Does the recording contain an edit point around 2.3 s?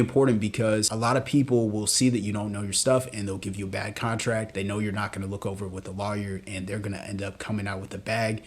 no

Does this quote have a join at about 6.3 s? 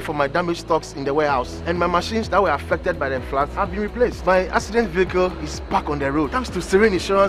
no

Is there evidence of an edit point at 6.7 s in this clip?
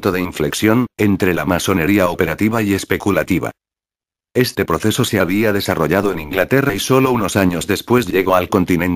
yes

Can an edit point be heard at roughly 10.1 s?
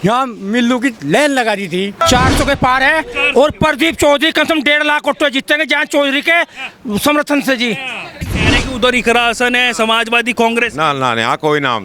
no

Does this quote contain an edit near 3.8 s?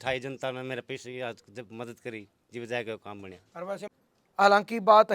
yes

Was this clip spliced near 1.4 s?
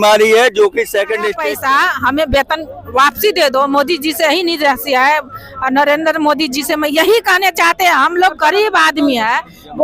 yes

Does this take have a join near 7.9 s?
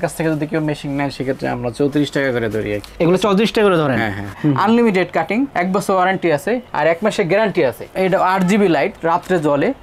yes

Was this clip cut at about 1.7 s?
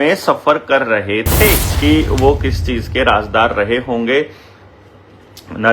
yes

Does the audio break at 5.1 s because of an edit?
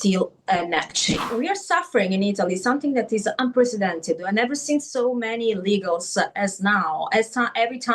no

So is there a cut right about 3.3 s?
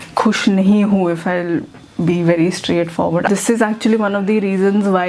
yes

